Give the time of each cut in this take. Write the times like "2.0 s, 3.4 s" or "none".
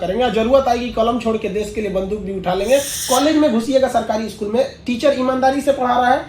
2.9 s